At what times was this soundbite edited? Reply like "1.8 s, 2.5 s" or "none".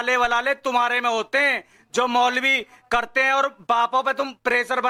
none